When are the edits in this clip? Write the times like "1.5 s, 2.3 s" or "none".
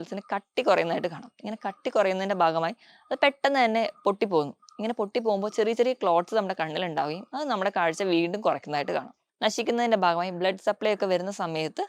9.2 s